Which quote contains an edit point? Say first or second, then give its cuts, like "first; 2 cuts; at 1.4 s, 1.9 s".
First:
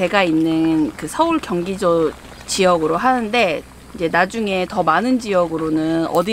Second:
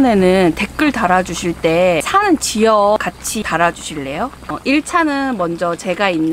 second; 3 cuts; at 2.0 s, 3.0 s, 4.5 s